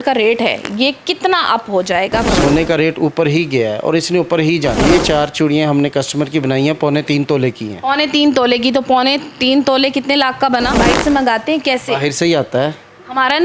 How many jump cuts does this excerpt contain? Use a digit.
3